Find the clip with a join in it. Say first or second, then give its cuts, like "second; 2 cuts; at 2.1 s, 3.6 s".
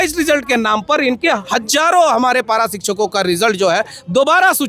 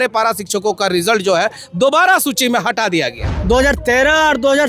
second; 1 cut; at 3.3 s